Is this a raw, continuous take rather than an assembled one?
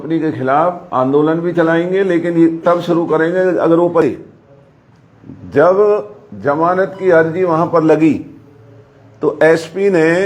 no; 1 cut; at 4.0 s

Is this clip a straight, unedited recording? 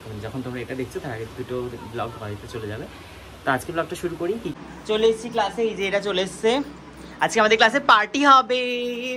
no; 1 cut; at 4.5 s

